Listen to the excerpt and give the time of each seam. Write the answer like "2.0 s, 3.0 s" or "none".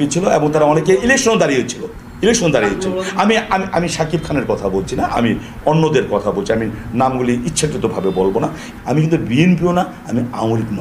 8.7 s